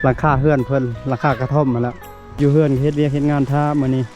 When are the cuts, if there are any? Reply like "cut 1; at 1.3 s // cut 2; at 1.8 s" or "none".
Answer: cut 1; at 2.4 s